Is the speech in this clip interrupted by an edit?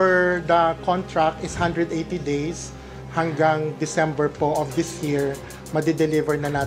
no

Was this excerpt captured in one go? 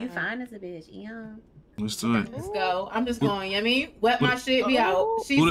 yes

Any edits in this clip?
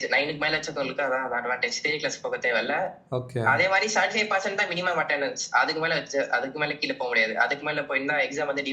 no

